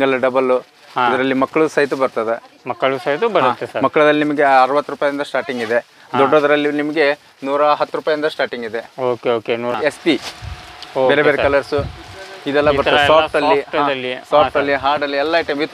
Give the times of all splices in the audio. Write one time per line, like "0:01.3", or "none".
0:09.7